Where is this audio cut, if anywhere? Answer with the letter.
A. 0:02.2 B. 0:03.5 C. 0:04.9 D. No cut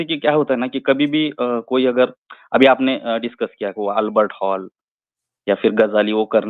D